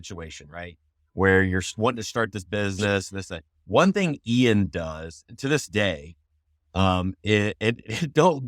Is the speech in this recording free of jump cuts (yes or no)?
yes